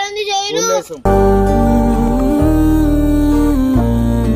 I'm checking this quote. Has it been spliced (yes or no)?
yes